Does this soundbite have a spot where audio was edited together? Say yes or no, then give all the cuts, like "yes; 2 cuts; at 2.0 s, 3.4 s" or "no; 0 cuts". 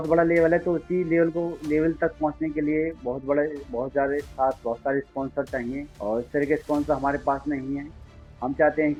no; 0 cuts